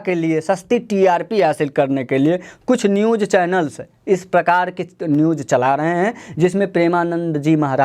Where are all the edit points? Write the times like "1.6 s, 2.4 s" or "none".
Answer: none